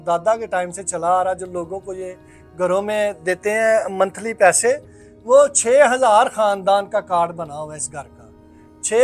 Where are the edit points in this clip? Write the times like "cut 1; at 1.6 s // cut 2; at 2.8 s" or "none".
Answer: none